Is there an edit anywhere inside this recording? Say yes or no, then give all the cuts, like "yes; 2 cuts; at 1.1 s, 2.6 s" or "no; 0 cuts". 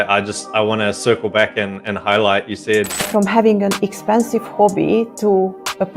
yes; 1 cut; at 2.9 s